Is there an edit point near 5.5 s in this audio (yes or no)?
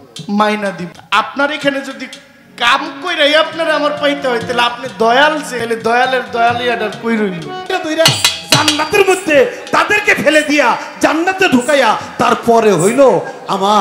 yes